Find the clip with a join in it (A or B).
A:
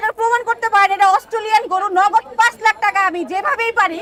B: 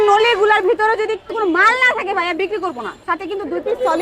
B